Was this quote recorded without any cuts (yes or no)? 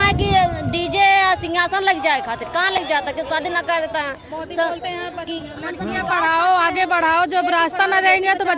yes